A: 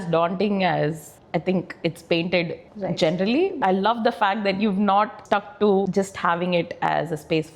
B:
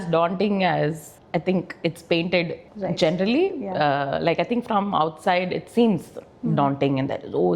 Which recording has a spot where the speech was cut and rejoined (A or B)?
A